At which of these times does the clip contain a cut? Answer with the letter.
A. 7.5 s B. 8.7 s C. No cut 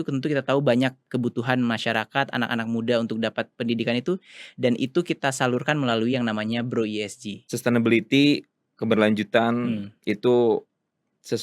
A